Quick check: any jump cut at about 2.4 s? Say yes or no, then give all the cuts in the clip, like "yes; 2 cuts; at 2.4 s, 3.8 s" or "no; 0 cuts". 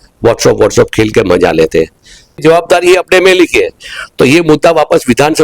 yes; 1 cut; at 2.4 s